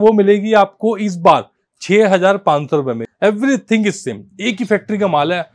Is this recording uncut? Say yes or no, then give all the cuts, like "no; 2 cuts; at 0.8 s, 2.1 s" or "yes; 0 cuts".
no; 1 cut; at 3.0 s